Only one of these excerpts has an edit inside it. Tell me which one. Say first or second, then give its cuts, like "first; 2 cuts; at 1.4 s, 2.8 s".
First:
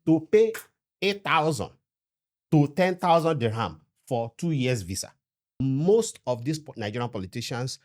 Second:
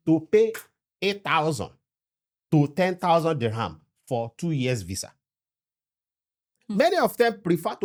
first; 1 cut; at 5.6 s